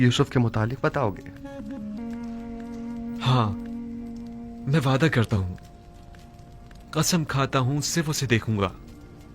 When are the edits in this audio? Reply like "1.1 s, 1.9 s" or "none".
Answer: 2.0 s